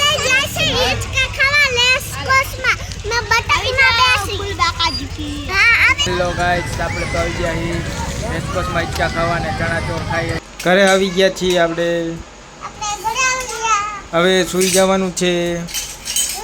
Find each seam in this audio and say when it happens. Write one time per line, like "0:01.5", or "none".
0:06.0
0:10.4